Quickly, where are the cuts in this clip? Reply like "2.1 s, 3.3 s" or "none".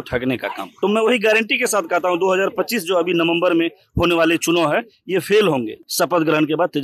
0.9 s, 5.8 s